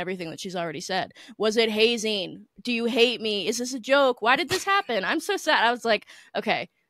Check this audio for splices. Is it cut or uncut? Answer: uncut